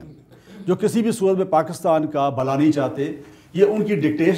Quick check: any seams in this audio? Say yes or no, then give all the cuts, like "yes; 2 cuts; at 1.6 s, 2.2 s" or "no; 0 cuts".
no; 0 cuts